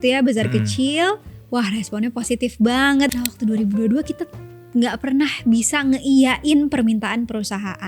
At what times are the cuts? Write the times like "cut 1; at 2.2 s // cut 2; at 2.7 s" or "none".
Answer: cut 1; at 3.1 s